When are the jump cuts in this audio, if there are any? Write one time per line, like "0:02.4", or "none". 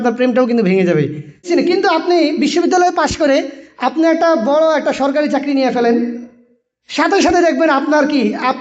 0:01.5